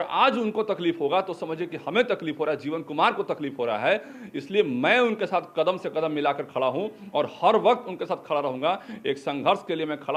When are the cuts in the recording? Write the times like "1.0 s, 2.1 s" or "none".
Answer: none